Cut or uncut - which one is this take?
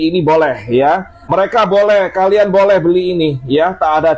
cut